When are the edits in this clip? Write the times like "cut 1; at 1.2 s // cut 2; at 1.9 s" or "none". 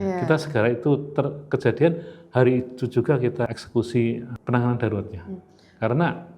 cut 1; at 3.5 s // cut 2; at 4.3 s